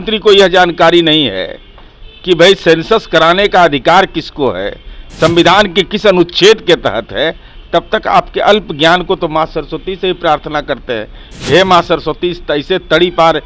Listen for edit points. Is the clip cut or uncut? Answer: uncut